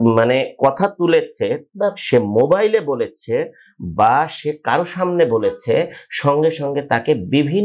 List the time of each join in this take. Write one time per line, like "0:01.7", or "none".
none